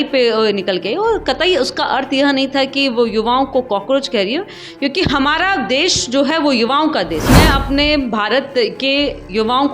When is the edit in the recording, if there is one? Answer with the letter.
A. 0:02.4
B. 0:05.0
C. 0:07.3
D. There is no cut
C